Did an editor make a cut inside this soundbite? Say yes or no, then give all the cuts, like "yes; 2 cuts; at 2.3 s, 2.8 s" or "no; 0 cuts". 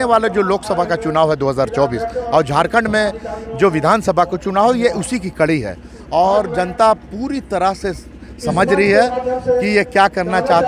no; 0 cuts